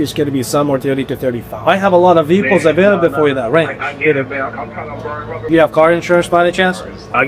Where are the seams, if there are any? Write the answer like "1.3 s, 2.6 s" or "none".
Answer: 5.4 s